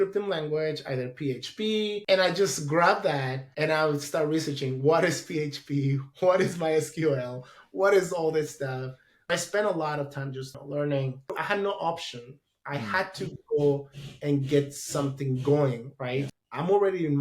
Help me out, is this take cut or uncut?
cut